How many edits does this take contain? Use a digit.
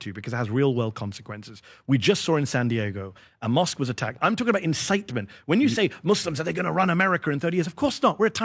1